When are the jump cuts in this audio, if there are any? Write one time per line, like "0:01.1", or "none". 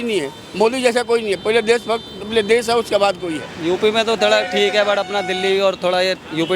0:03.5

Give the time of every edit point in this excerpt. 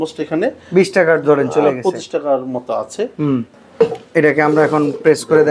0:03.5

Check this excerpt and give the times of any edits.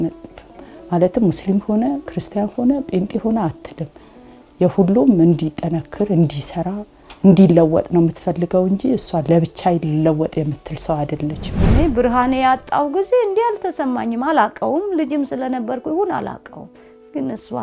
0:11.5

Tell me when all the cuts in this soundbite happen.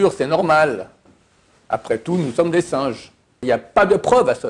0:03.4

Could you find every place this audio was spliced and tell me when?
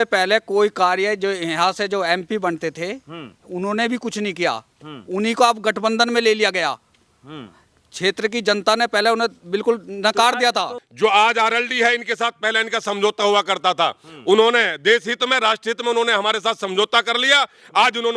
0:10.8

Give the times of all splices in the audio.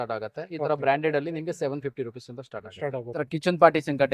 0:03.2

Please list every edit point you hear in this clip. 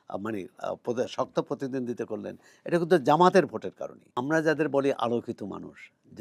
0:04.1

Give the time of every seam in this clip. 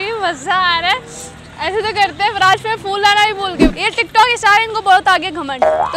0:03.7

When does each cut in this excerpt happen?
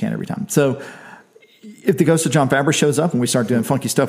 none

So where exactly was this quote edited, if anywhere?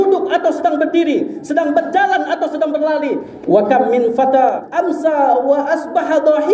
0:03.3
0:04.7

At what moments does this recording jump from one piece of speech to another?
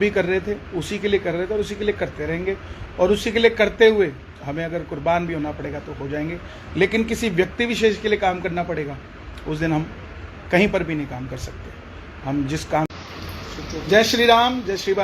0:12.9

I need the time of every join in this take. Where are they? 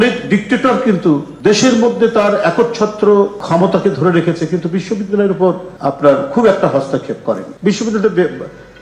0:07.5

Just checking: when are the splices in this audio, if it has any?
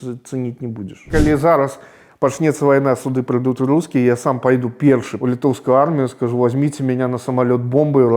0:01.0
0:05.1

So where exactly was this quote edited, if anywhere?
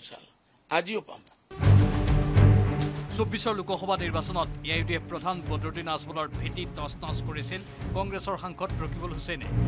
0:00.9

